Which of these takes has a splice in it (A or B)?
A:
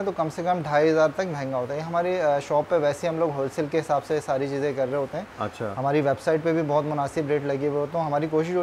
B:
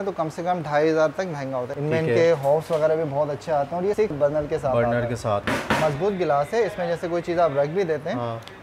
B